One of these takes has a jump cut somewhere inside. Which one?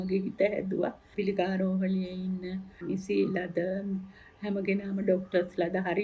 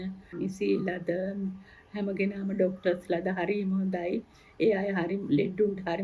first; 1 cut; at 1.1 s

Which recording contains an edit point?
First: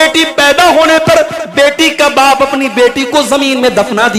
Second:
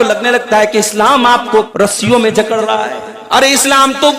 second; 2 cuts; at 1.7 s, 3.1 s

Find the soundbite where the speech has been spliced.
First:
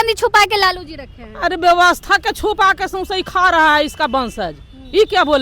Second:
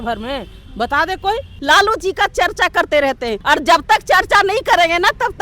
second; 2 cuts; at 1.5 s, 3.4 s

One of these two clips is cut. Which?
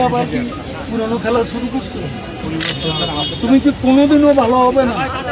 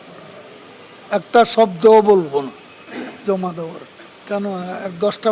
second; 1 cut; at 4.2 s

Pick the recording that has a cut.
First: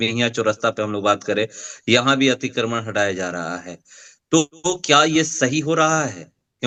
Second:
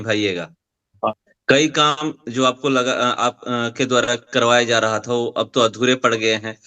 second; 1 cut; at 1.0 s

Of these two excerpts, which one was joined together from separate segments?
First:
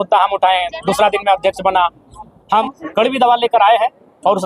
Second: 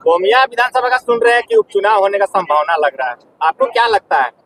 first; 1 cut; at 2.7 s

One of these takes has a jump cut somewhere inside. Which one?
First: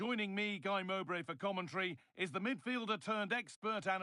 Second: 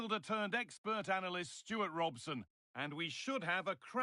second; 1 cut; at 2.5 s

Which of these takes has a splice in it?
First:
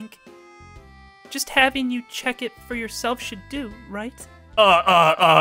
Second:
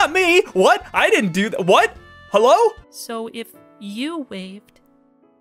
second; 1 cut; at 2.9 s

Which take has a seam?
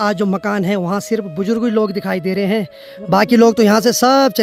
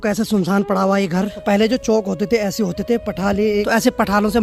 second; 2 cuts; at 1.3 s, 3.7 s

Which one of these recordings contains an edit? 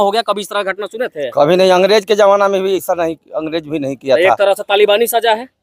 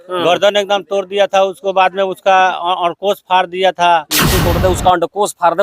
second; 1 cut; at 4.2 s

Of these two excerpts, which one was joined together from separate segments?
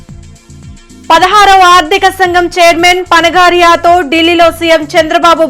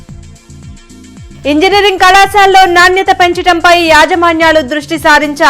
first; 1 cut; at 1.0 s

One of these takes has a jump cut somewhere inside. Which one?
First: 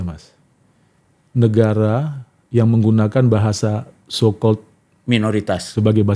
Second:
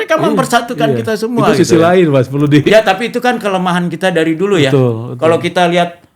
second; 1 cut; at 2.7 s

